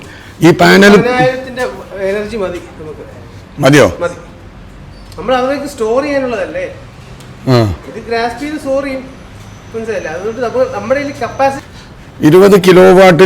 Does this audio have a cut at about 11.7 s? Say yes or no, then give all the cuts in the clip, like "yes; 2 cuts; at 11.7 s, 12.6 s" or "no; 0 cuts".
yes; 1 cut; at 11.7 s